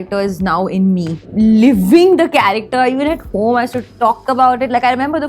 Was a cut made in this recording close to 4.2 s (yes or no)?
no